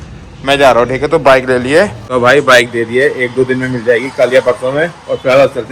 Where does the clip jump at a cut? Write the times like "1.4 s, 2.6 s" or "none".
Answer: 2.0 s